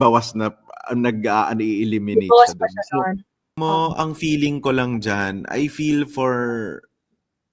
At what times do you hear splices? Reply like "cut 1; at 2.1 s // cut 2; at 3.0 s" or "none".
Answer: cut 1; at 3.5 s